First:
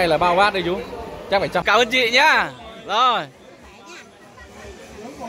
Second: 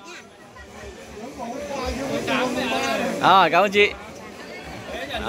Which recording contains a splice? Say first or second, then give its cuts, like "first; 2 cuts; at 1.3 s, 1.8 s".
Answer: first; 1 cut; at 1.6 s